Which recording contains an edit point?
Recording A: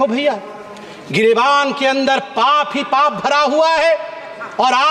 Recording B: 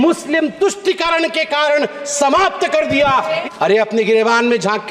B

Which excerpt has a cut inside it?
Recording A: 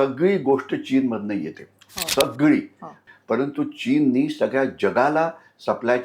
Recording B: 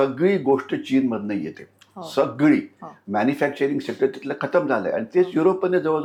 A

